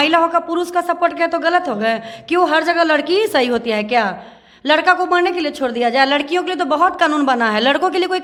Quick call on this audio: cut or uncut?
uncut